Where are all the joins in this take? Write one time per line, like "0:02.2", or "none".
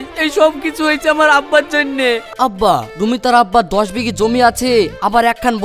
0:02.2